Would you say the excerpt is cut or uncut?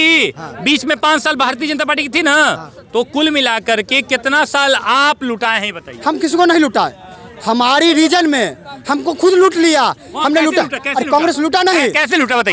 uncut